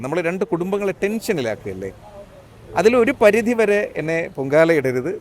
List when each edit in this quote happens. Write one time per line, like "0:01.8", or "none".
none